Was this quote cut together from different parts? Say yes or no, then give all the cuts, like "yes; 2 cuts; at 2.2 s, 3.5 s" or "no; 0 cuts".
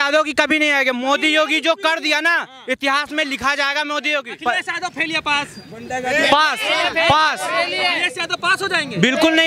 yes; 1 cut; at 4.3 s